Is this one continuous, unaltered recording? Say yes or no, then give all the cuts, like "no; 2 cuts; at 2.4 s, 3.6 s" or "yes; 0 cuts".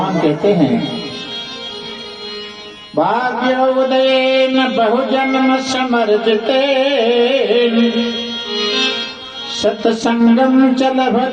no; 1 cut; at 4.2 s